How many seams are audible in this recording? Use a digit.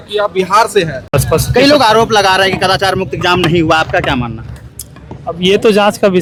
0